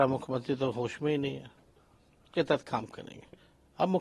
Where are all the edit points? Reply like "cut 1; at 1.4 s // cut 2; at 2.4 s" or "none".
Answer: cut 1; at 2.3 s